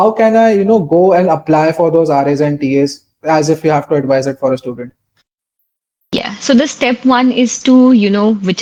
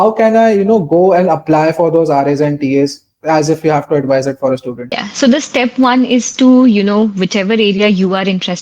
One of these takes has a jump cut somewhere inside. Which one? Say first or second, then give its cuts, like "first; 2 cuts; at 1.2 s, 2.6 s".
second; 1 cut; at 5.0 s